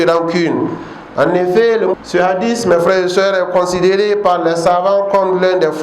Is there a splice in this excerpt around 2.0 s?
yes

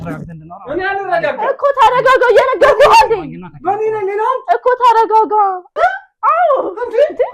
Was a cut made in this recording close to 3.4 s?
no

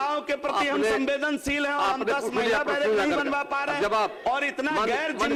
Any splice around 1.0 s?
no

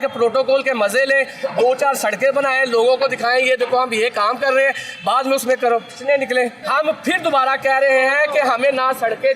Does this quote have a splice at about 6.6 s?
yes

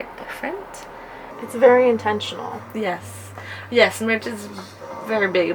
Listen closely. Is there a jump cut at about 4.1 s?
no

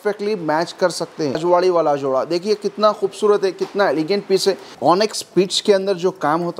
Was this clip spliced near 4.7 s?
yes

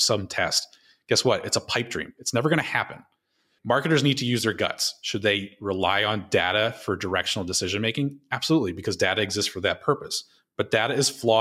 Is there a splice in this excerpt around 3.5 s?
yes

